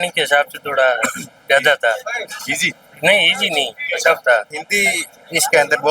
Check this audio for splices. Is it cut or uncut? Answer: uncut